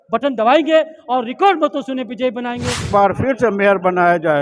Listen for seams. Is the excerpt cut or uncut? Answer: cut